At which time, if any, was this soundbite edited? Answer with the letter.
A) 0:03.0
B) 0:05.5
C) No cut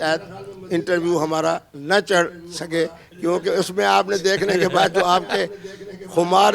C